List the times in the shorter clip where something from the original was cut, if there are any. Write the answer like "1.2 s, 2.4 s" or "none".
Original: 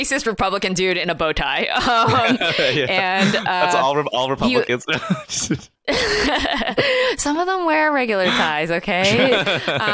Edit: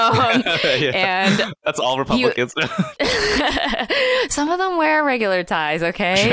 1.8 s, 2.9 s